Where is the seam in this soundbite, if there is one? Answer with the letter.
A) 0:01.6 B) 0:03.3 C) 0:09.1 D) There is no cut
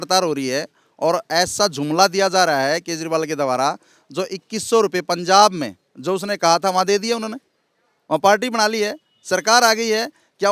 D